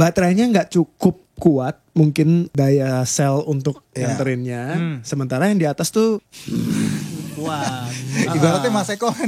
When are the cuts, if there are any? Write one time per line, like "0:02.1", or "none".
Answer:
0:02.5
0:06.3